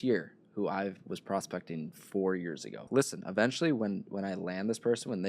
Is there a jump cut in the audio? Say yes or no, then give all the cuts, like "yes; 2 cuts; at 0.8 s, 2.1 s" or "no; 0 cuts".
yes; 1 cut; at 2.9 s